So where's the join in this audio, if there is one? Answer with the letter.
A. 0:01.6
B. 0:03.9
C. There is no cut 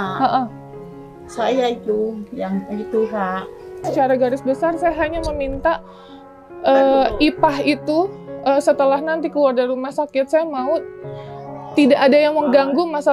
B